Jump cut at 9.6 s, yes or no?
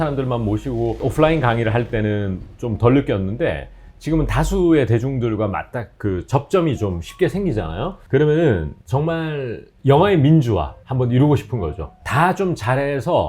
no